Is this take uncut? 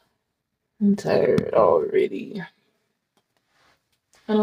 yes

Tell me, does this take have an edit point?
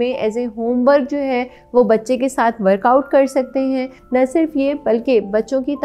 yes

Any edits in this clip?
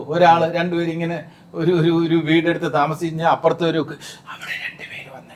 no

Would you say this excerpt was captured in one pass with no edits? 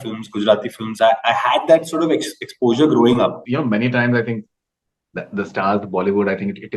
no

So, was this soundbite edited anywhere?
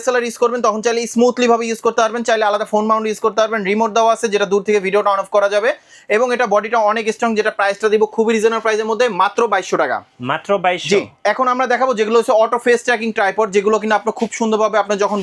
no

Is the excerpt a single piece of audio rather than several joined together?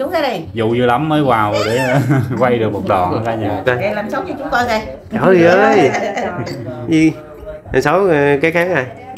no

